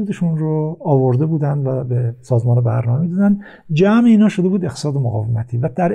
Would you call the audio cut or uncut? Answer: uncut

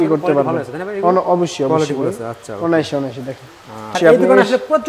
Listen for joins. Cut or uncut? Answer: cut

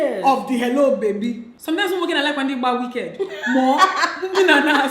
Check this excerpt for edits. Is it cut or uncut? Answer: cut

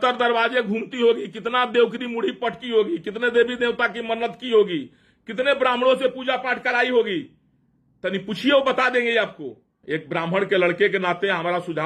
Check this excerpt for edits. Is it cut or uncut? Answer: cut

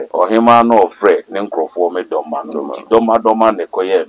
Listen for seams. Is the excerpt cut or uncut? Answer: uncut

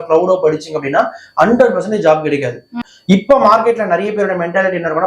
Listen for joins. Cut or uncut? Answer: cut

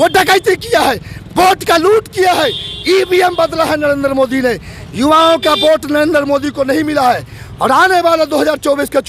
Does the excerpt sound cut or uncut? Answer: uncut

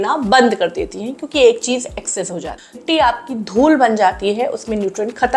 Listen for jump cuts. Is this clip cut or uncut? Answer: cut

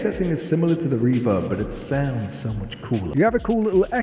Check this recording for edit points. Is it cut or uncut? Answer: cut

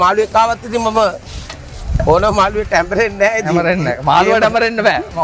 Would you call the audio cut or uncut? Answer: uncut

